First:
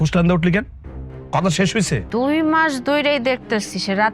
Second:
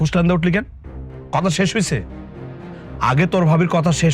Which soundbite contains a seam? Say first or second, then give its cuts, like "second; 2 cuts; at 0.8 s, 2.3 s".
first; 1 cut; at 2.0 s